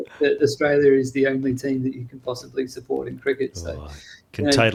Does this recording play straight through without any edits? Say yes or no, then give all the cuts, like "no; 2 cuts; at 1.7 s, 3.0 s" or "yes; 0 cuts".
yes; 0 cuts